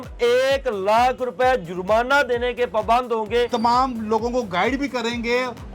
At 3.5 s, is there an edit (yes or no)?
yes